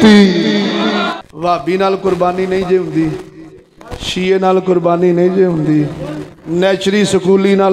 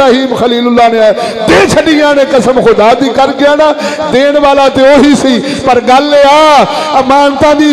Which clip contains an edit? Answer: first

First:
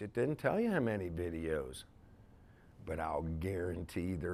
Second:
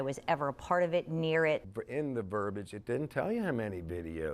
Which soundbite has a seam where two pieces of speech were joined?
second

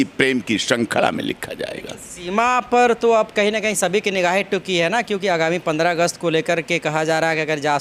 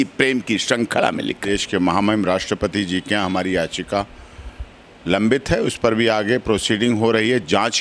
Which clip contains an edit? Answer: second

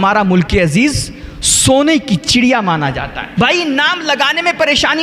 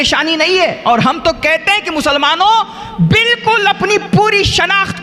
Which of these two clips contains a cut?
first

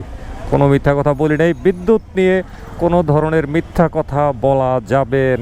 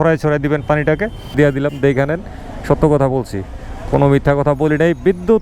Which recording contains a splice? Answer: second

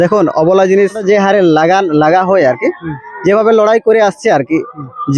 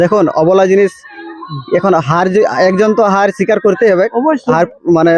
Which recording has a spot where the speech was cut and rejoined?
first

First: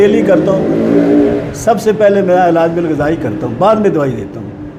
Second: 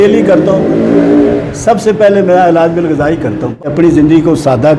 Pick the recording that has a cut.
second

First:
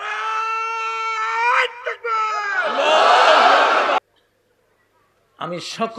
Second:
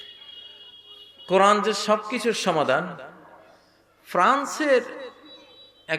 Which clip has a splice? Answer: first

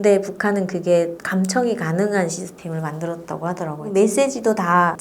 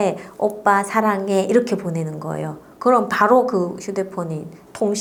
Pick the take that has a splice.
first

